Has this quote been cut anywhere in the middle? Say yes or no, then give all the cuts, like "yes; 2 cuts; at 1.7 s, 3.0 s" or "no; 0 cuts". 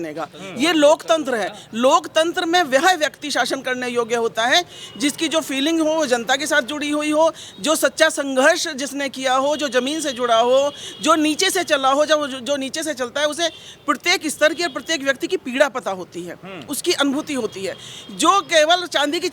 no; 0 cuts